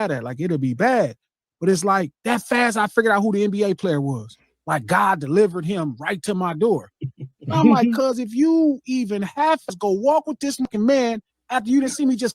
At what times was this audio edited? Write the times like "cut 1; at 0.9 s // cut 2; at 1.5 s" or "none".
cut 1; at 9.7 s // cut 2; at 10.7 s